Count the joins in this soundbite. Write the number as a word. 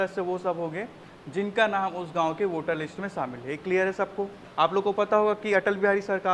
one